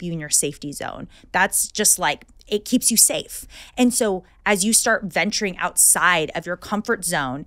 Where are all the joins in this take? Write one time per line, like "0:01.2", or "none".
none